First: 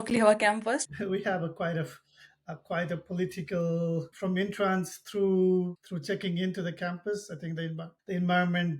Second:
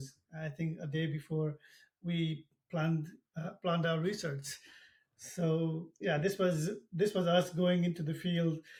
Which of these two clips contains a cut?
first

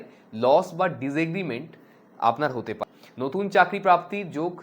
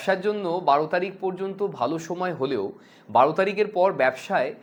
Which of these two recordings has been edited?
first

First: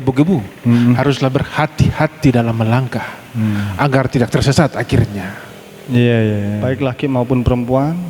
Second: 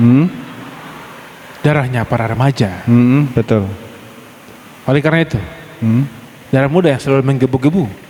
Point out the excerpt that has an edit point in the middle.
first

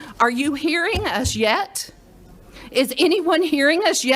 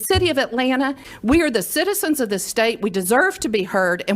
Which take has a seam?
second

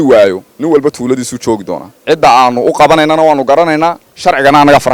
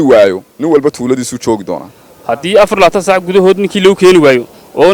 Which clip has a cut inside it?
second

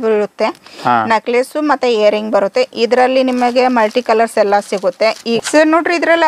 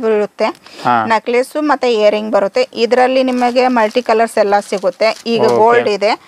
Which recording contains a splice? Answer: first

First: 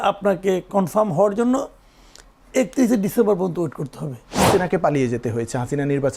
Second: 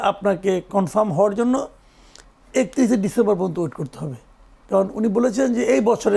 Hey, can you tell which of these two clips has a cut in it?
first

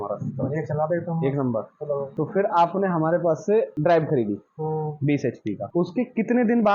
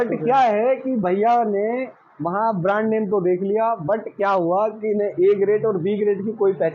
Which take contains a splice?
first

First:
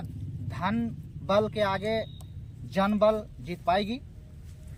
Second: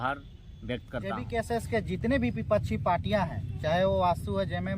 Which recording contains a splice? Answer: second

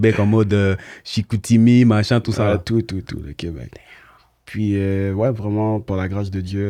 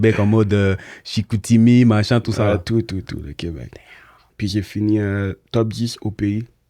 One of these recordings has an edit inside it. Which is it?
second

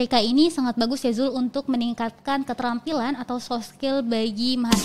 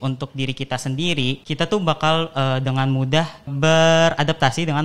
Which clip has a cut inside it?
second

